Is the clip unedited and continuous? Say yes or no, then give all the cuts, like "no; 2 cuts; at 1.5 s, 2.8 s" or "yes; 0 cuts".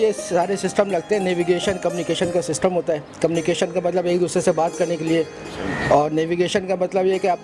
yes; 0 cuts